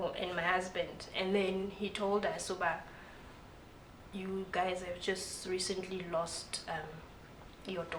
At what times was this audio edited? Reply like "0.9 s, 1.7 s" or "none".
none